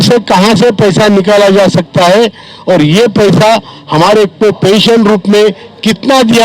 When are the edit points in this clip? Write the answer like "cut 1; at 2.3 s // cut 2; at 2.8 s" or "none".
none